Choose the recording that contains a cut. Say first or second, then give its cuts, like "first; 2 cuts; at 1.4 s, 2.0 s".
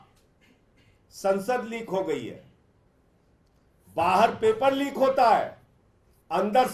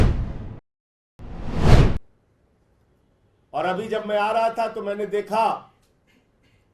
second; 1 cut; at 2.1 s